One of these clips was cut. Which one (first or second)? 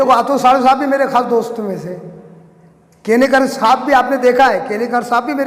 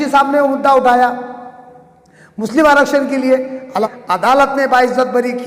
second